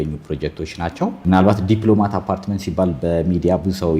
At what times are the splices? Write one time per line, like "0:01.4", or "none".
0:01.2

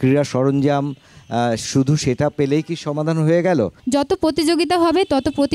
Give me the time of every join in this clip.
0:03.8

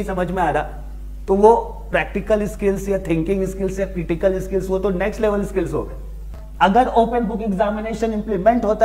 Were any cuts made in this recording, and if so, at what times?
0:06.4

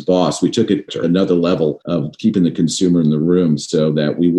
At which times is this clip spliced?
0:01.0
0:01.8

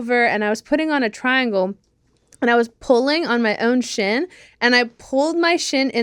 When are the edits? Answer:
none

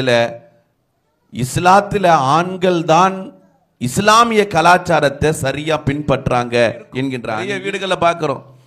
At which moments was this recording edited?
0:07.2

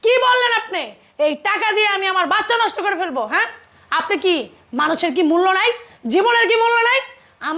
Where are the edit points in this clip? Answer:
none

